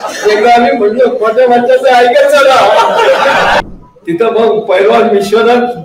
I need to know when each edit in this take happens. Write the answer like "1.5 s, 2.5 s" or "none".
3.6 s